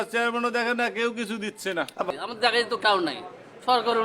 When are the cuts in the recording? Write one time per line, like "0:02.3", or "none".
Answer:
0:02.1

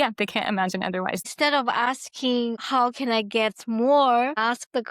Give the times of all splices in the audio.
0:01.3
0:02.6

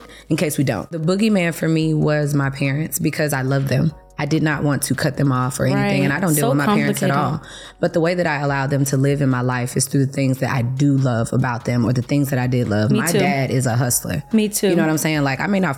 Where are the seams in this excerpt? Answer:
0:00.9

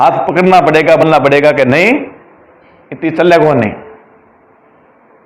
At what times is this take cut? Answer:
0:01.0

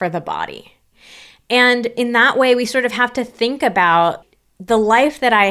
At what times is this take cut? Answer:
0:04.2

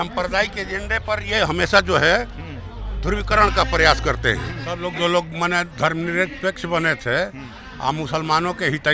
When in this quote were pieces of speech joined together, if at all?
0:04.8

